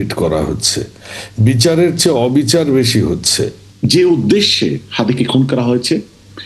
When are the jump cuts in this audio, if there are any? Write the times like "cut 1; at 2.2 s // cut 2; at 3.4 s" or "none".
cut 1; at 3.6 s